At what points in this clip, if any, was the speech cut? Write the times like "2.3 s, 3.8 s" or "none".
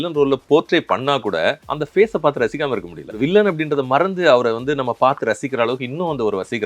1.7 s, 3.1 s